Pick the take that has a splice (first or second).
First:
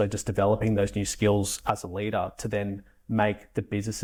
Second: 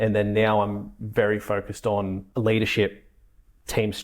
second